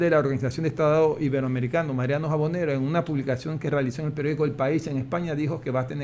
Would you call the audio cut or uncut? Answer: uncut